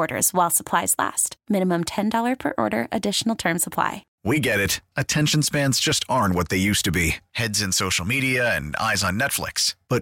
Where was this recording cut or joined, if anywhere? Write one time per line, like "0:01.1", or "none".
0:04.1